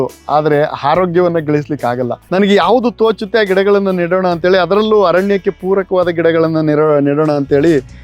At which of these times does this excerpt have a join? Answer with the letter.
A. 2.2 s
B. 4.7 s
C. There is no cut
A